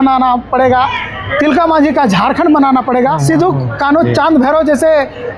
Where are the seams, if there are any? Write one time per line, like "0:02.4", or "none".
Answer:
0:03.2